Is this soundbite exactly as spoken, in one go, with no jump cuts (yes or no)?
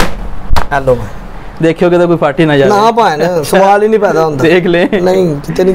yes